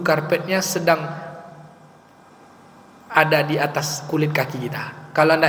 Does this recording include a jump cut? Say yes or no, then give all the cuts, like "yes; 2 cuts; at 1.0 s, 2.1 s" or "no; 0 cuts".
no; 0 cuts